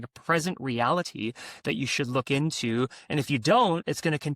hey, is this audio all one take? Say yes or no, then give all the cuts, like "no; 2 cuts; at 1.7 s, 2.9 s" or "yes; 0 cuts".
yes; 0 cuts